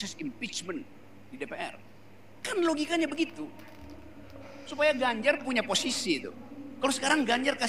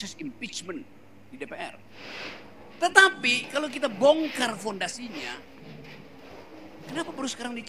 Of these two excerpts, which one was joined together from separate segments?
second; 1 cut; at 2.0 s

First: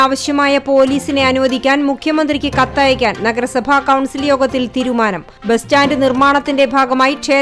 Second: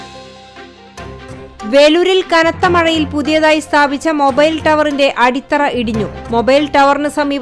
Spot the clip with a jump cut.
second; 1 cut; at 1.5 s

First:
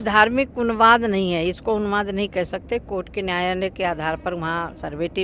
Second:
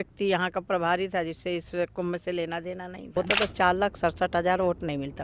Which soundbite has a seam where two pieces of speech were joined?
second; 1 cut; at 3.2 s

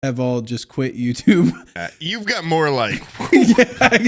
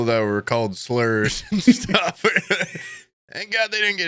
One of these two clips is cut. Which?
first; 1 cut; at 1.7 s

